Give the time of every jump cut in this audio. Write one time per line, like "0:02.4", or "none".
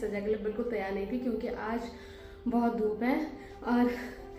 none